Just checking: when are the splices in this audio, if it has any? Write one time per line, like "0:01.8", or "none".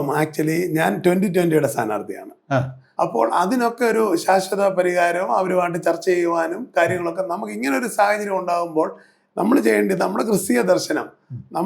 0:02.8